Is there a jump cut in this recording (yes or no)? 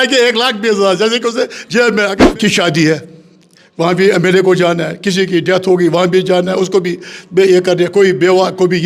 yes